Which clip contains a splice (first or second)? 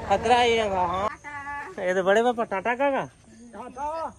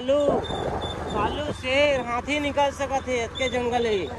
first